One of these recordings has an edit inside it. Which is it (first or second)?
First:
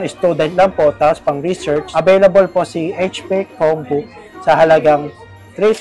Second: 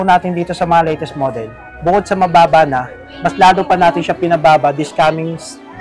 first